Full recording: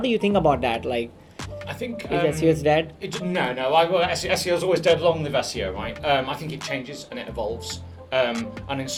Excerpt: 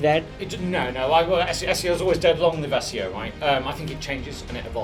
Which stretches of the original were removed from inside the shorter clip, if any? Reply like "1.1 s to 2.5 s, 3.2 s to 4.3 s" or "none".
none